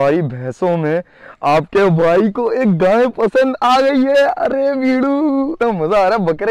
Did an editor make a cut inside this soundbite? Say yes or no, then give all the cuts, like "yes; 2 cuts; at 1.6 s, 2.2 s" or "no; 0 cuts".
no; 0 cuts